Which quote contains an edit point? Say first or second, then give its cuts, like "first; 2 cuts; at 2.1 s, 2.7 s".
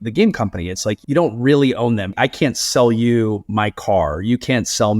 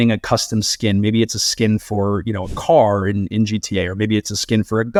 first; 2 cuts; at 1.0 s, 2.1 s